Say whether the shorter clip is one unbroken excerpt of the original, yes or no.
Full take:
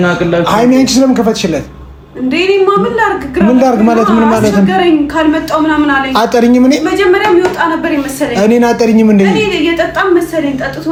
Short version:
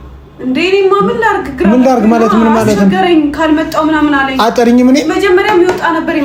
yes